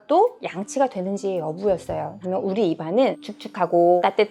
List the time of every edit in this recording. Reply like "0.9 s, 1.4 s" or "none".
2.1 s